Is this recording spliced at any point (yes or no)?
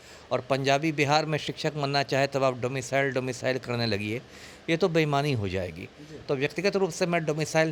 no